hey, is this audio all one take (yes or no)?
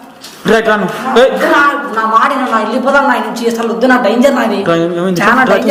yes